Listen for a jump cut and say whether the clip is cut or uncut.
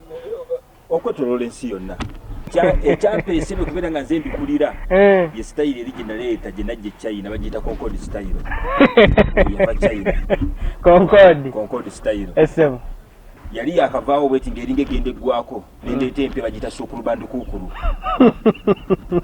cut